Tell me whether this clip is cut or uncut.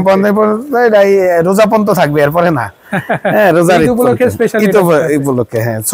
uncut